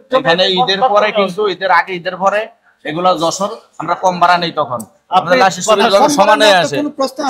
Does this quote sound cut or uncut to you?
uncut